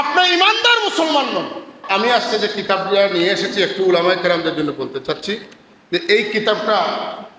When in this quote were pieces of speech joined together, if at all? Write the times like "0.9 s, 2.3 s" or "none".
1.8 s